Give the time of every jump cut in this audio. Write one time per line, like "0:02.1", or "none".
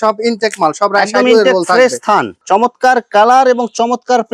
0:02.3